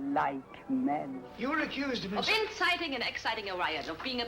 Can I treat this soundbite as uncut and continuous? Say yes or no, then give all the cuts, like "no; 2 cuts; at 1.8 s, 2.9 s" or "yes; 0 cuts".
no; 1 cut; at 1.2 s